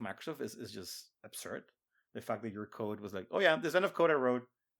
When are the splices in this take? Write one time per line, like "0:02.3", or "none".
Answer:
none